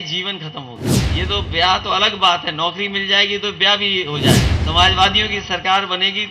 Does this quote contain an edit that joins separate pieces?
yes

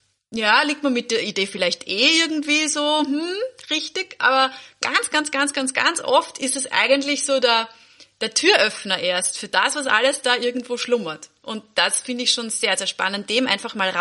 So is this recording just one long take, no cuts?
yes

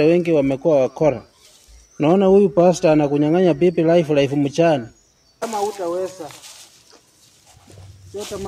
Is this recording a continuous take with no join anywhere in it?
no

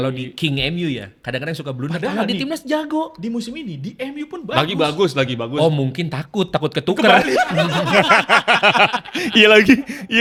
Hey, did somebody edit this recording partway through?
no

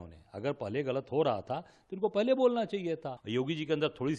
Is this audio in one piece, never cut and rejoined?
no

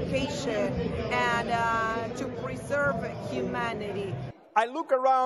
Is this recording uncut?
no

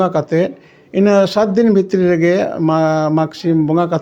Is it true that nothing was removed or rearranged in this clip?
yes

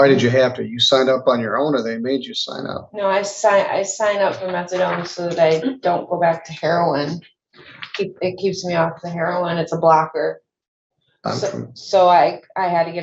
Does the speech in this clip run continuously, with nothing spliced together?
yes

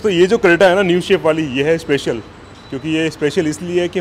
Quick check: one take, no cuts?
yes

